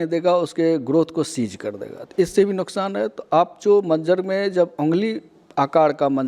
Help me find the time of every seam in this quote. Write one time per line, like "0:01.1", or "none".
none

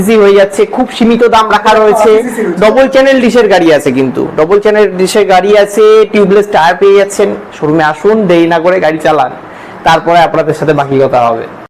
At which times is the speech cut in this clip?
none

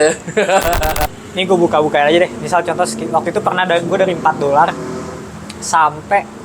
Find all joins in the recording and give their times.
0:00.9

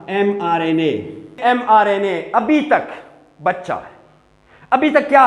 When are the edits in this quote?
0:01.4

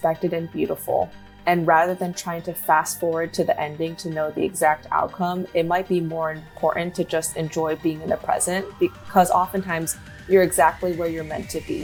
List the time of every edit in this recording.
none

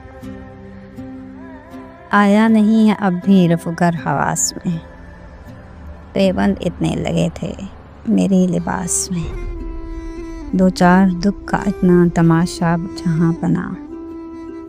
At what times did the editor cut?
0:02.0
0:08.0

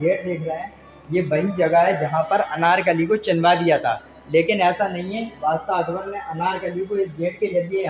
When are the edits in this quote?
none

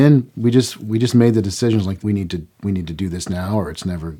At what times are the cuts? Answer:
0:02.0

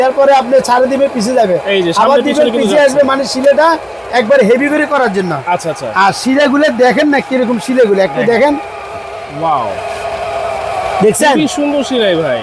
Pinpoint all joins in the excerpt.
none

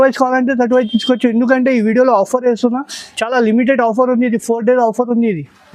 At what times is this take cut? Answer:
none

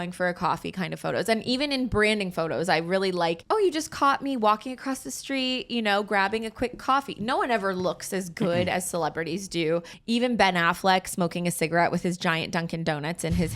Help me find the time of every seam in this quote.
0:03.4
0:09.9

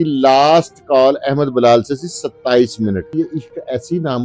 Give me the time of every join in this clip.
0:03.1

